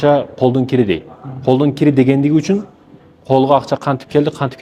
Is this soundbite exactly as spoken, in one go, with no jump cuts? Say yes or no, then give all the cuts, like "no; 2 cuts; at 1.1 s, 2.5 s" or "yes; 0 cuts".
yes; 0 cuts